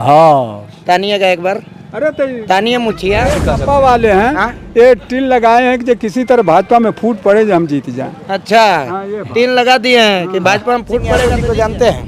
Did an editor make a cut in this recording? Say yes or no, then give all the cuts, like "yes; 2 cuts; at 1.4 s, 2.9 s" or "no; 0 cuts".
yes; 2 cuts; at 3.4 s, 11.2 s